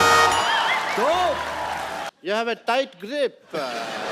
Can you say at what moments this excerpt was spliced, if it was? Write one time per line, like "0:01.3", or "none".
0:02.1